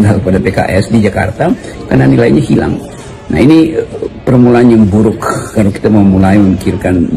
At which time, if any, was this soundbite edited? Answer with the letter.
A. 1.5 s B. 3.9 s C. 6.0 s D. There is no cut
D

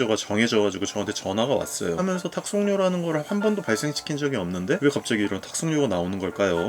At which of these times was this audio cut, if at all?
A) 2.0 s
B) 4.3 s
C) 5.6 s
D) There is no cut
A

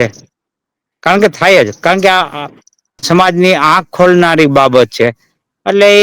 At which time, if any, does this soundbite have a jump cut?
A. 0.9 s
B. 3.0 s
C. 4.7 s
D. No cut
B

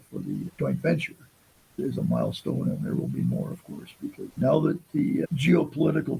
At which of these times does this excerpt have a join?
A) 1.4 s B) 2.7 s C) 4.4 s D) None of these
D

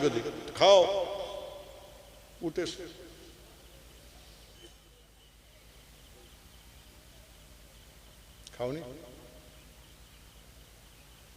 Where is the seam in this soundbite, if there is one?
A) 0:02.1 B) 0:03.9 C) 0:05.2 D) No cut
C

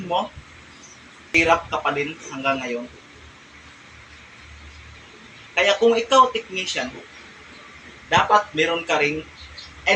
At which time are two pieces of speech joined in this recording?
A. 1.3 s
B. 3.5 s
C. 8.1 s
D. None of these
A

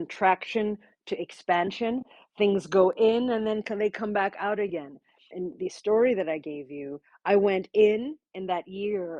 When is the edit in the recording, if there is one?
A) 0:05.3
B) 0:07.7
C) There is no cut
A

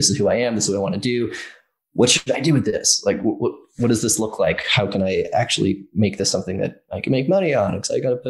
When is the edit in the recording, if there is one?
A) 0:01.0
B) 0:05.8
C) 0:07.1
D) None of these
D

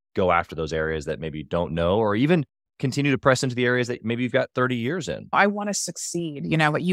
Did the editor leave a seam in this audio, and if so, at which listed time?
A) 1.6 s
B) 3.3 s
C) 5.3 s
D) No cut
C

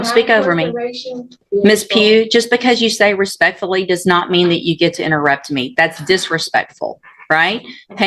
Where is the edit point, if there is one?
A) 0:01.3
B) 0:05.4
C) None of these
A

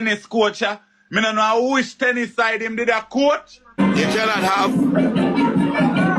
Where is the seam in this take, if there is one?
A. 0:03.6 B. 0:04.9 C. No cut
A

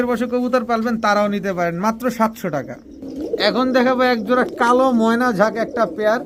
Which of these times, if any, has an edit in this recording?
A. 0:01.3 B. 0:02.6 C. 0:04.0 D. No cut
D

